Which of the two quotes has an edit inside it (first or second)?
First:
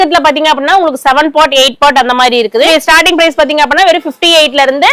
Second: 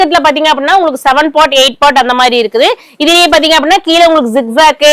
first